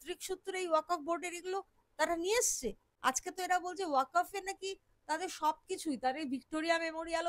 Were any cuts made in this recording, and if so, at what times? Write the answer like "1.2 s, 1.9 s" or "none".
2.9 s